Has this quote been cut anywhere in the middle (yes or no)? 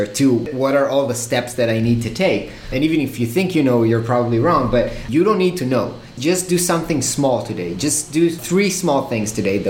yes